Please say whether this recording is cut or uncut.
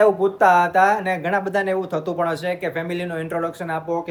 uncut